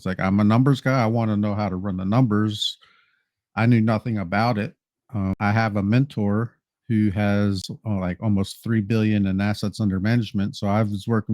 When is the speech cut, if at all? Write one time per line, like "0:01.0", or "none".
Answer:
0:05.3
0:07.7